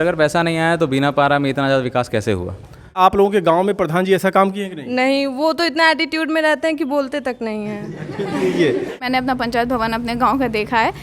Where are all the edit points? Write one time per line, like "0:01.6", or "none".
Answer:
0:03.0
0:09.1